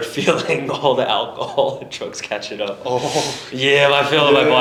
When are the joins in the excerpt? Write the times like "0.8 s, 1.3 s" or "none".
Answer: none

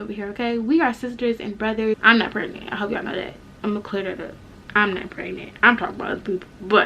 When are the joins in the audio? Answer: 1.9 s

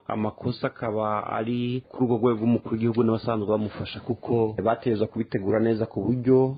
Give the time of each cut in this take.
none

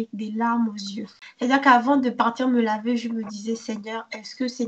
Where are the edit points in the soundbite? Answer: 1.2 s

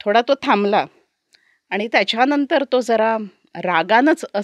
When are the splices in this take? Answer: none

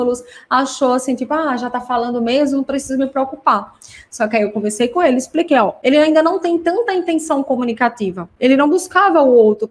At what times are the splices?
5.8 s, 8.3 s

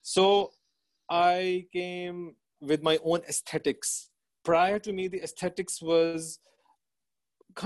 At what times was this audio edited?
none

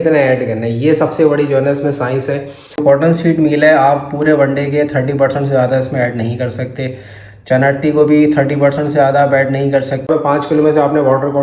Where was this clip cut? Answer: 2.8 s, 10.1 s

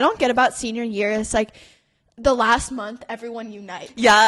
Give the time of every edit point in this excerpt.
none

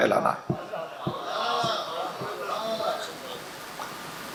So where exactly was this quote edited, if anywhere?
none

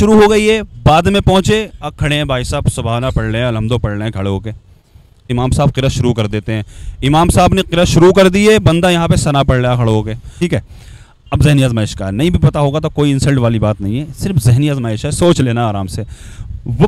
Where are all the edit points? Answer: 5.3 s, 10.3 s

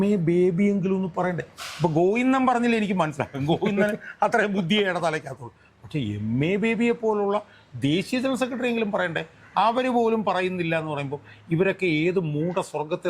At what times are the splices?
none

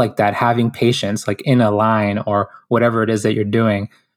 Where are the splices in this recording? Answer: none

